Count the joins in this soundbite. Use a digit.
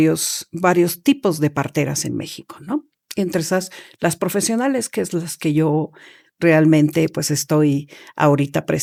0